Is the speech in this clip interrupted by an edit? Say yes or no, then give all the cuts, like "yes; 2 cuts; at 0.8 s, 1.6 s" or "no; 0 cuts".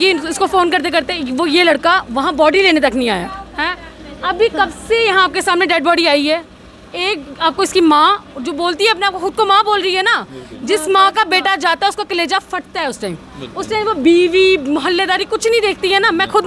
no; 0 cuts